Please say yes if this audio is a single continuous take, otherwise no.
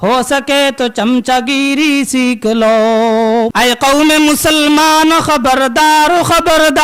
no